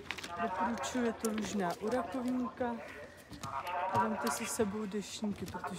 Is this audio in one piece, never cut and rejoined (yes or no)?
yes